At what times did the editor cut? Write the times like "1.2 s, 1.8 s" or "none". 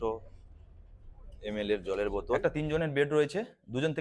2.4 s